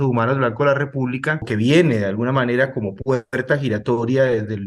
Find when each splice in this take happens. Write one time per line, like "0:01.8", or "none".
0:01.5